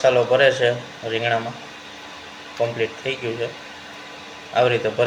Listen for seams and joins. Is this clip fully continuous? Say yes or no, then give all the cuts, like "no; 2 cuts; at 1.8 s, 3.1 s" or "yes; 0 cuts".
yes; 0 cuts